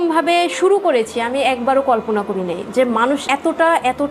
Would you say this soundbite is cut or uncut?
uncut